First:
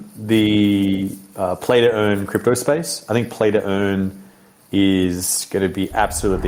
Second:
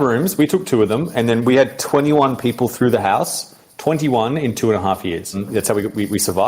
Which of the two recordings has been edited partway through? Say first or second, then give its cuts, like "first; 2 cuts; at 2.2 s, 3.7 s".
second; 1 cut; at 5.3 s